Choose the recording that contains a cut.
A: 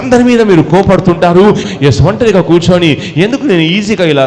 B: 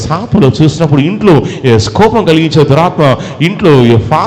A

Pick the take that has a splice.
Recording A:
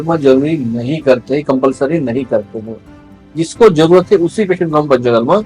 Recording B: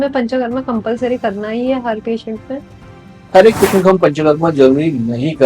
B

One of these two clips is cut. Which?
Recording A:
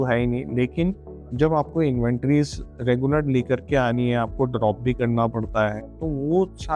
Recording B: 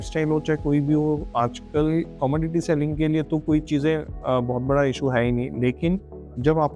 B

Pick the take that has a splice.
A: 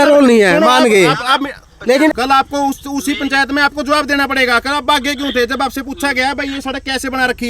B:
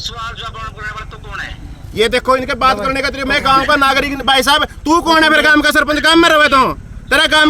A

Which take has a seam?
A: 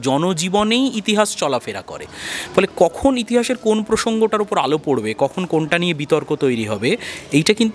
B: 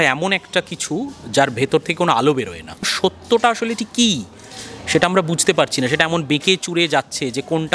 B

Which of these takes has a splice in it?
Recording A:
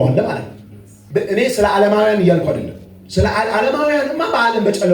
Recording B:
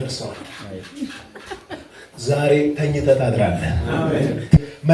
A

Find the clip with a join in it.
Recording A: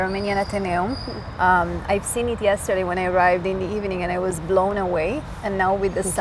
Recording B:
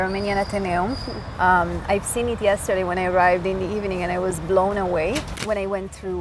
B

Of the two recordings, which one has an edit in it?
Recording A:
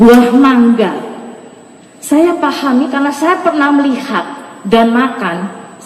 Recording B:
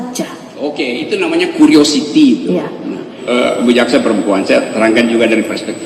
B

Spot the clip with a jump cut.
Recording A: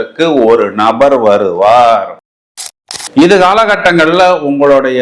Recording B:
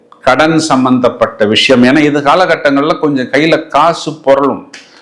A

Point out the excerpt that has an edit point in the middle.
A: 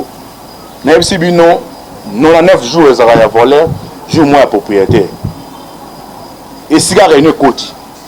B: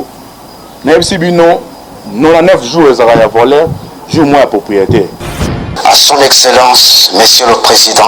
B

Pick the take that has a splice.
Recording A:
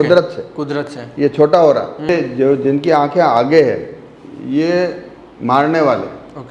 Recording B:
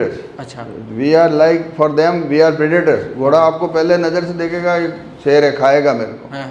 A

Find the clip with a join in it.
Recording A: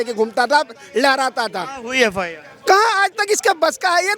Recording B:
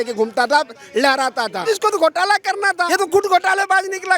B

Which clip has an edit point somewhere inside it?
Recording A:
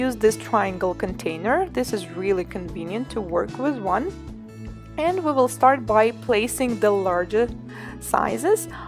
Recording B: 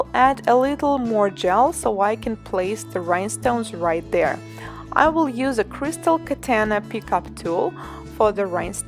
B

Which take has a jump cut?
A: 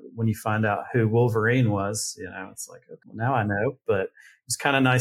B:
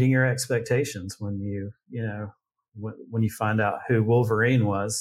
A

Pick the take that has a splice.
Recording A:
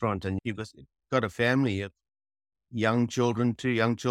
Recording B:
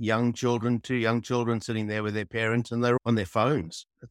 B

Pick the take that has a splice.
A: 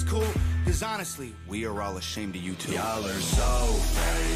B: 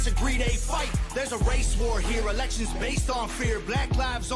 A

